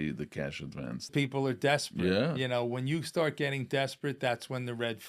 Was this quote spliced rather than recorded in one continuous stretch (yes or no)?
yes